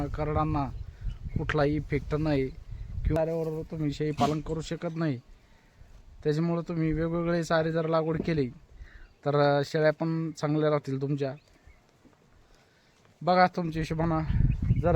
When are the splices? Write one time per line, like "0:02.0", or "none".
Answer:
0:03.2